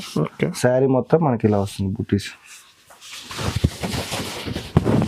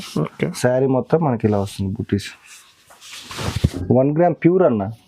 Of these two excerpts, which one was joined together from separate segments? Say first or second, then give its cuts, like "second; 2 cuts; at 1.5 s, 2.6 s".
second; 1 cut; at 3.7 s